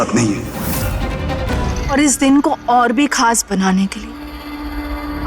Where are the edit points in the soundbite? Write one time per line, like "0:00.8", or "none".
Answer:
0:01.5